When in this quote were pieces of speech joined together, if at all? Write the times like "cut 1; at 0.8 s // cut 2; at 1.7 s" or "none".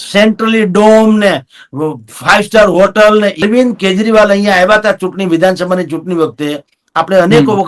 cut 1; at 3.4 s